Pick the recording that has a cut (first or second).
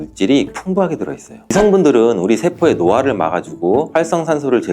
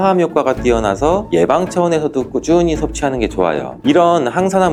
first